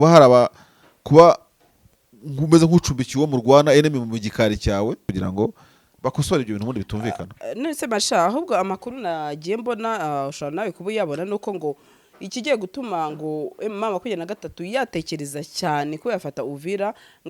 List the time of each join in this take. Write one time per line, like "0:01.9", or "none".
0:05.1